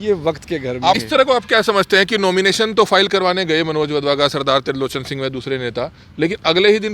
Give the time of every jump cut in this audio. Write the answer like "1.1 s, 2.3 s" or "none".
1.0 s